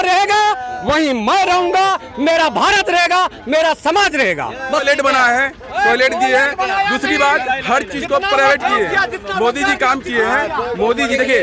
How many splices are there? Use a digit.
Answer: 1